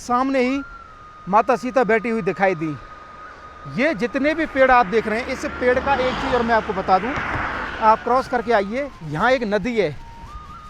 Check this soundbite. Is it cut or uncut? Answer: uncut